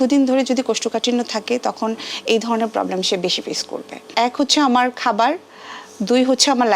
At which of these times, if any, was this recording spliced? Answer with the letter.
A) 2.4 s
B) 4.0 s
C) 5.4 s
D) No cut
B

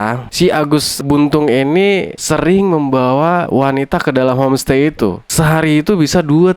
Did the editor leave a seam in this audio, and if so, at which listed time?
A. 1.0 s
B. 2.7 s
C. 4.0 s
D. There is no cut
A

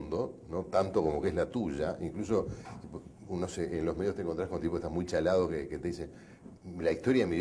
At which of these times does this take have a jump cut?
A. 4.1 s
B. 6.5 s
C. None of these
A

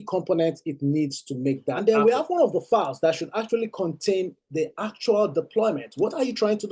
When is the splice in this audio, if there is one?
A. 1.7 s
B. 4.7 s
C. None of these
A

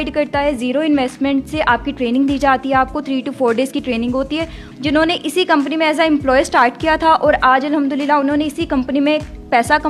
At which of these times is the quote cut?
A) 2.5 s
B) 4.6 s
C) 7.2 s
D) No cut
B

